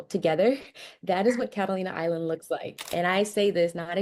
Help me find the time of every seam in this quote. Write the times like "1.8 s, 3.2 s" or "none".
2.9 s

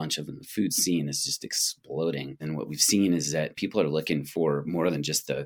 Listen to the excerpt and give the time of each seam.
2.4 s, 3.6 s

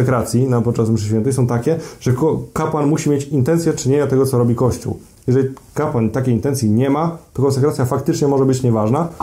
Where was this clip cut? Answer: none

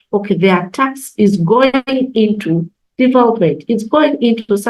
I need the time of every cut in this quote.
none

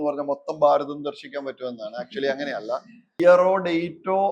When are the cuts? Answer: 3.2 s

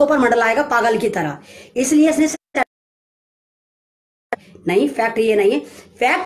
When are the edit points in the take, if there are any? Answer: none

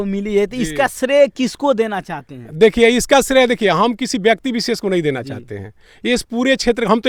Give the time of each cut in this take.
none

